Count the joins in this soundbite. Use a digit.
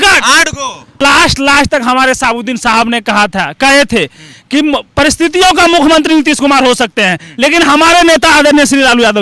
1